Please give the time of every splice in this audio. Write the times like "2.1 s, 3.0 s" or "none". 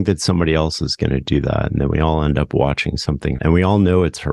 3.4 s